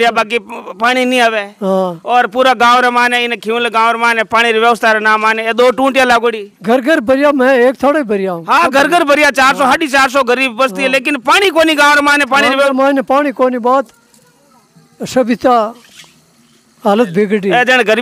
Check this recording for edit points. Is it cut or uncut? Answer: uncut